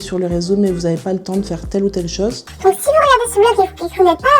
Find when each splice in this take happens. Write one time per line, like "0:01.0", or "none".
0:02.4